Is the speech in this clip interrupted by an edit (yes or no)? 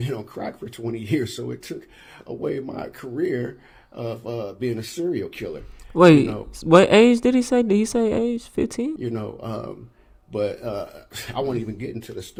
no